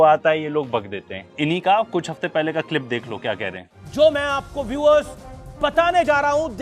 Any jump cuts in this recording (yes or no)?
no